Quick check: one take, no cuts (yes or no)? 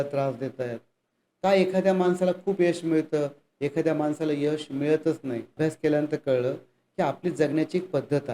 no